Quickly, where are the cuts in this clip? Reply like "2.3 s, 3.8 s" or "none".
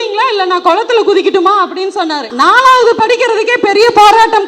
2.3 s